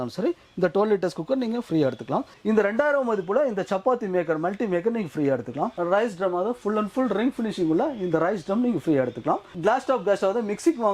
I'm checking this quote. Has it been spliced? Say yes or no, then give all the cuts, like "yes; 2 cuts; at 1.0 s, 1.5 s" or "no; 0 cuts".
yes; 3 cuts; at 2.3 s, 5.8 s, 9.5 s